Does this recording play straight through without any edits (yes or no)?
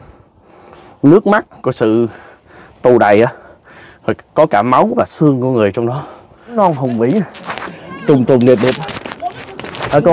no